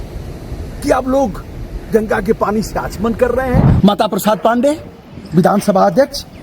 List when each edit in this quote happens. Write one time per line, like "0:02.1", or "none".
0:03.7